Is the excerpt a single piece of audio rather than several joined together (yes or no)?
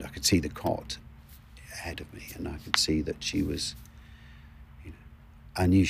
yes